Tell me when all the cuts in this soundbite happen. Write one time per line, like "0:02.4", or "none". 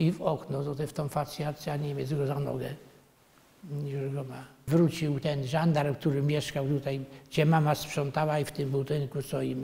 0:04.6